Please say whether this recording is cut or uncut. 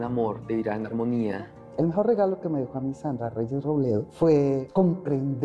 cut